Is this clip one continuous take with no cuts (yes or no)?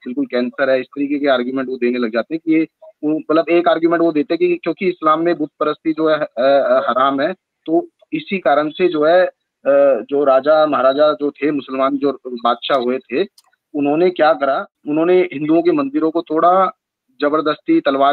no